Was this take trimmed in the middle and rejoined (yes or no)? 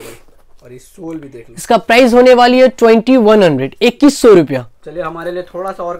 no